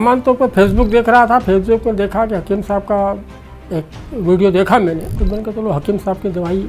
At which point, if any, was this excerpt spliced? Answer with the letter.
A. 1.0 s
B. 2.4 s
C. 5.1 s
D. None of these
C